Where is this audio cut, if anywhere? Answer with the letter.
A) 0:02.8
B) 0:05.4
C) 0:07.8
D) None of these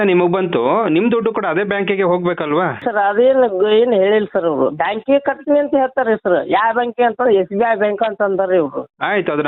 A